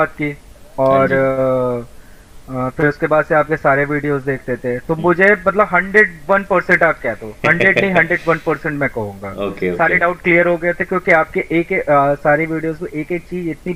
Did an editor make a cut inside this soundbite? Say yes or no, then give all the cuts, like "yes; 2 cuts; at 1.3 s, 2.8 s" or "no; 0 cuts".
no; 0 cuts